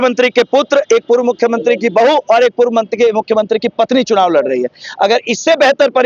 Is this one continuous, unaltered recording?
yes; 0 cuts

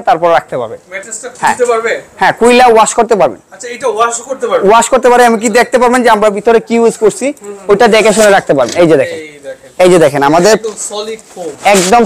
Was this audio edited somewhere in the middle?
no; 0 cuts

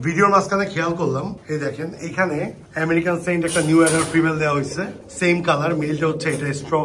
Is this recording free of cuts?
yes; 0 cuts

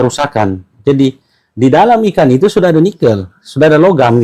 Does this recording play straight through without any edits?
yes; 0 cuts

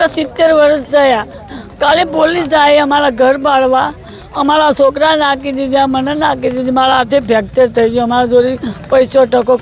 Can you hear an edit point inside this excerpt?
no; 0 cuts

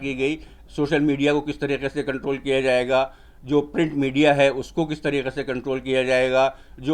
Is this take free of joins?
yes; 0 cuts

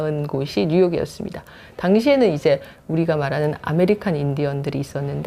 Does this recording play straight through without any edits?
yes; 0 cuts

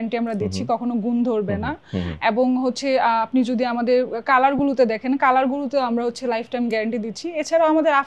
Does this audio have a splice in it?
no; 0 cuts

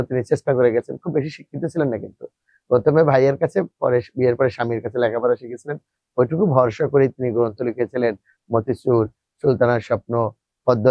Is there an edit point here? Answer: no; 0 cuts

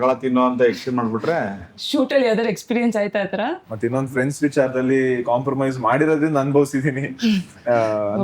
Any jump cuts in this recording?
yes; 1 cut; at 3.7 s

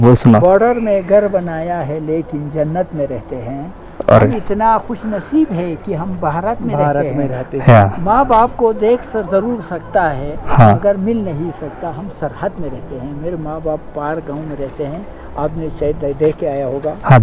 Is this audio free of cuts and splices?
yes; 0 cuts

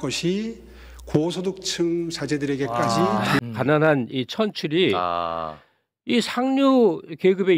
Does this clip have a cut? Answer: yes; 1 cut; at 3.4 s

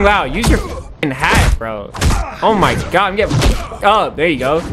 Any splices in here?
no; 0 cuts

